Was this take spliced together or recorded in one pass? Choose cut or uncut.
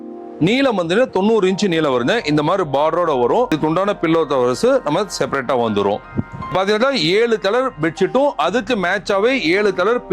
cut